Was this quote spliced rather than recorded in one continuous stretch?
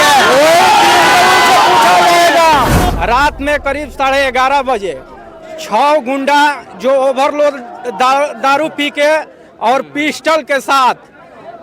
yes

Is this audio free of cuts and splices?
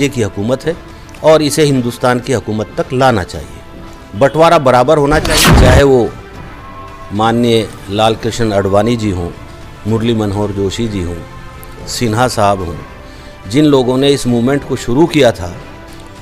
no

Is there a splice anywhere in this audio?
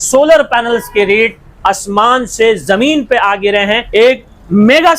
yes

